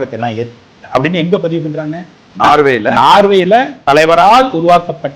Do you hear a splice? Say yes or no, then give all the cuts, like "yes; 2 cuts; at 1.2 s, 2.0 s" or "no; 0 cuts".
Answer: yes; 1 cut; at 2.2 s